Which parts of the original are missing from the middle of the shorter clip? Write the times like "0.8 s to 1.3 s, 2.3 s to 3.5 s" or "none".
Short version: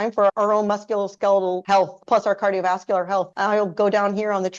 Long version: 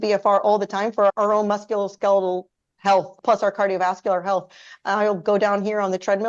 2.4 s to 2.8 s, 4.5 s to 4.8 s